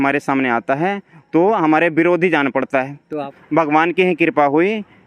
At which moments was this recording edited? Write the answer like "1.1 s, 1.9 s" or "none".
3.3 s